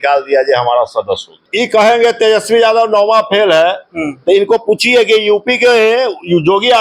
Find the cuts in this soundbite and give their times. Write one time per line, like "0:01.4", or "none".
0:01.4

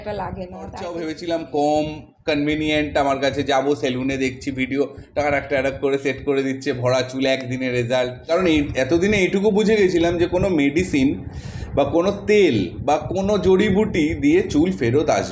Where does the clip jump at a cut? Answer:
0:00.9
0:08.3

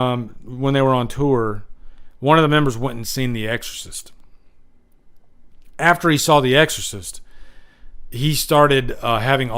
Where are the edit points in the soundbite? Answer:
none

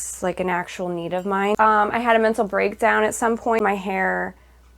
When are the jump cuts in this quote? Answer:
0:01.5
0:03.6

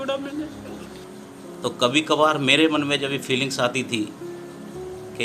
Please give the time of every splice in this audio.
0:01.0

